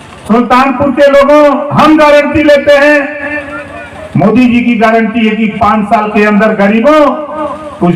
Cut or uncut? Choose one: uncut